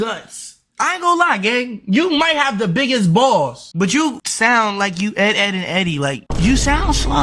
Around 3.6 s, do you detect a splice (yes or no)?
yes